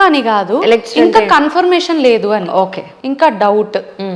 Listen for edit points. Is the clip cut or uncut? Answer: uncut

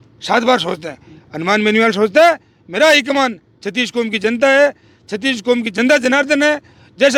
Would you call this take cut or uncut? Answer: uncut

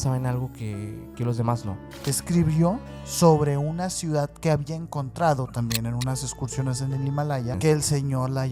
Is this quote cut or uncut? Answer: cut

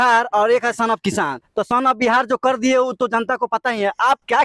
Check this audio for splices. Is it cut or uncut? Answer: uncut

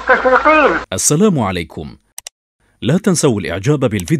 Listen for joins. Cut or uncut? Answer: cut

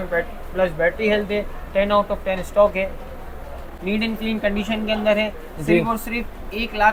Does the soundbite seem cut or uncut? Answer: uncut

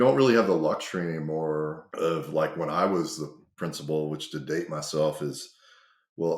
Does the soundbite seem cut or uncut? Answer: cut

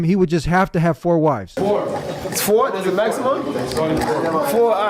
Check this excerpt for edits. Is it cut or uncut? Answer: cut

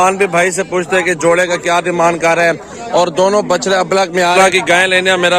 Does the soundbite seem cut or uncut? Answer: cut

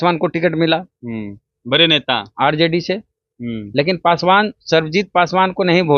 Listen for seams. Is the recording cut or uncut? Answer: uncut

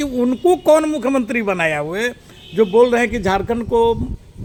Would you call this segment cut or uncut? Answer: uncut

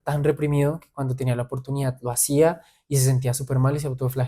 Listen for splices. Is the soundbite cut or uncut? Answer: uncut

